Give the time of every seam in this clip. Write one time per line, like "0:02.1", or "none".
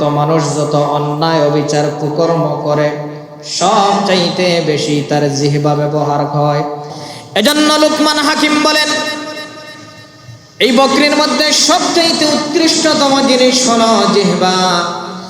0:06.9